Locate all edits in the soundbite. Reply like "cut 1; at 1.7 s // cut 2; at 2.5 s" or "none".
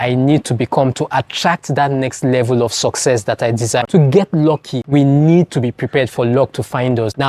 cut 1; at 3.8 s